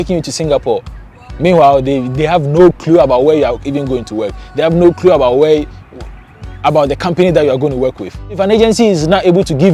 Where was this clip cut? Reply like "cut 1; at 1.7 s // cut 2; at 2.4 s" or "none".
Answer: cut 1; at 8.4 s